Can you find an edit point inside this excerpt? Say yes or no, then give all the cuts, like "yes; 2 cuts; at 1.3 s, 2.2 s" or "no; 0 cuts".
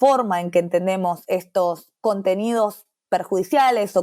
yes; 1 cut; at 1.9 s